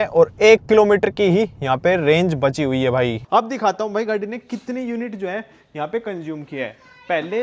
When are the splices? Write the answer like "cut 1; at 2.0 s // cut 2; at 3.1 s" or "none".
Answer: cut 1; at 3.2 s